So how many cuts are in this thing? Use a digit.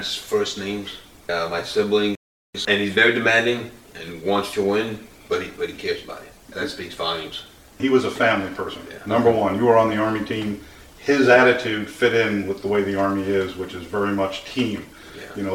2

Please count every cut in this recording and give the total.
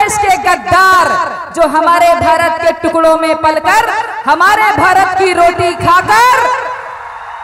0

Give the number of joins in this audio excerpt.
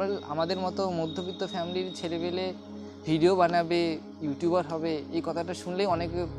0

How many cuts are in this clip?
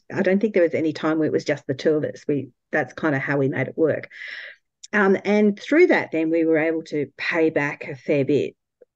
0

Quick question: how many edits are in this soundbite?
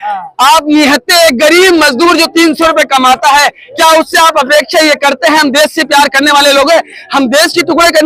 0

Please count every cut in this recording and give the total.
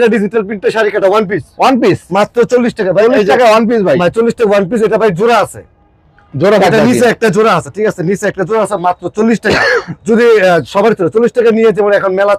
0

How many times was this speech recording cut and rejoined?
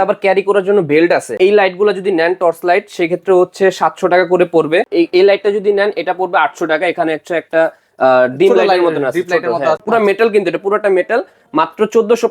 3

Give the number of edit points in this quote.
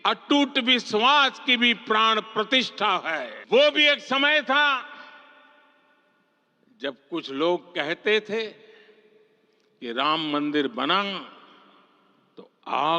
1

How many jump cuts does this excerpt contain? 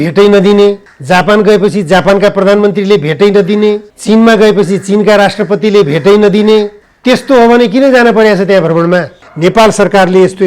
4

